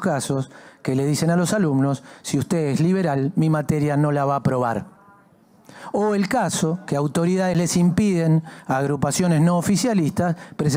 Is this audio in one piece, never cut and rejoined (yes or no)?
yes